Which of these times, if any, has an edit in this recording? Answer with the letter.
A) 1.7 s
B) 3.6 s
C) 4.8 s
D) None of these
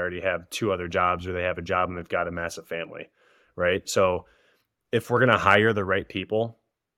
D